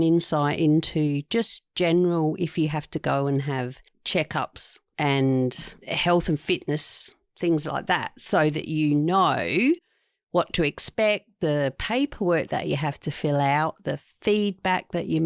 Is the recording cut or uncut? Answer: uncut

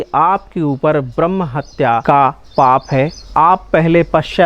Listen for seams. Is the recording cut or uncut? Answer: cut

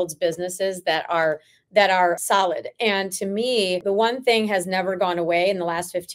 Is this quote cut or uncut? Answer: cut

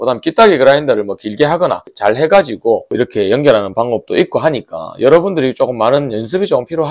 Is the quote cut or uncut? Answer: cut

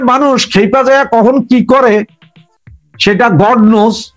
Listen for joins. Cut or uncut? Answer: uncut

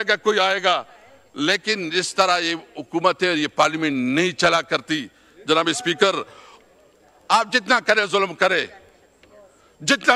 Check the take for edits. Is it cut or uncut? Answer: cut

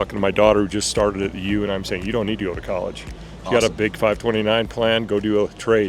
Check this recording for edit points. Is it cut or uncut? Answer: uncut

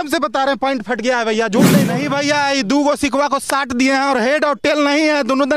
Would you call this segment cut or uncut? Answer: cut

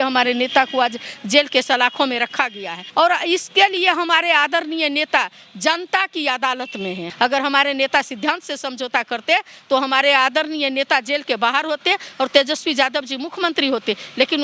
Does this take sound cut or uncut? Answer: cut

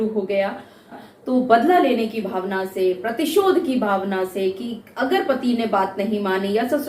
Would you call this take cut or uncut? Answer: cut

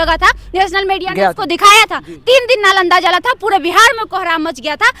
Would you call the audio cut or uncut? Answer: uncut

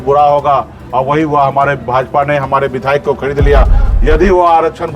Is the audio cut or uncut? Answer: cut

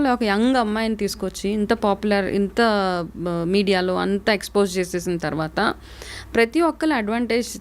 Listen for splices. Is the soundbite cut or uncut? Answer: uncut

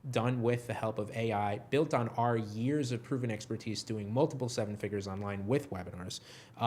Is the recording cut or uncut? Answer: uncut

